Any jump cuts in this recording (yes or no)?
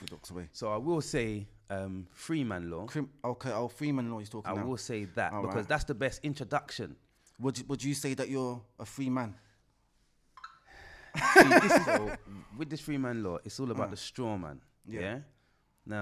yes